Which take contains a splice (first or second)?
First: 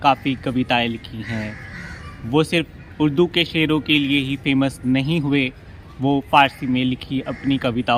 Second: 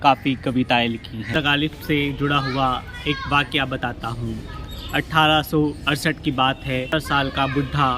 second